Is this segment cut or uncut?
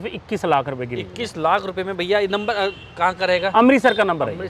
uncut